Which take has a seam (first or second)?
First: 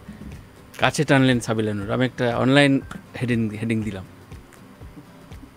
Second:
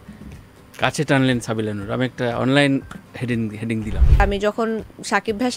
second